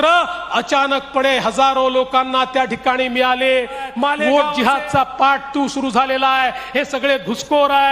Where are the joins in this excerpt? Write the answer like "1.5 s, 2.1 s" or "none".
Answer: 4.2 s